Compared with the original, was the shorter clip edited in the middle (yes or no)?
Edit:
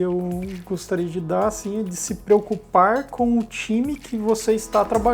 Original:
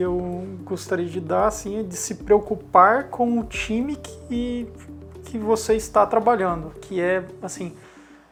yes